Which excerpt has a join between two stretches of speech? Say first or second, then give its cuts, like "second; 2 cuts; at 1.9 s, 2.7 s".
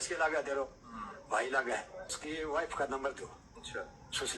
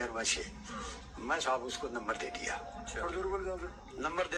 first; 1 cut; at 2.1 s